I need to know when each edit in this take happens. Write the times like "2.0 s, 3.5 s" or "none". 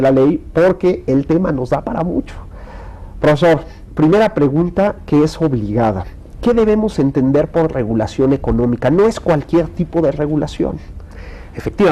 5.7 s